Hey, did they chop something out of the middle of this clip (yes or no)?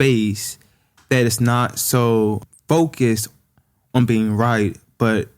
yes